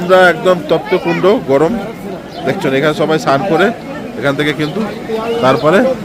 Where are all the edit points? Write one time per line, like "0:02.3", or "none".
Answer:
none